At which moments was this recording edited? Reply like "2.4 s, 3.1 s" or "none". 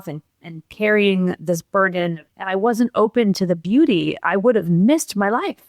2.3 s